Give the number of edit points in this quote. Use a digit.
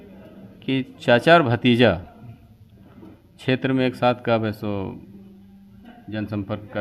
0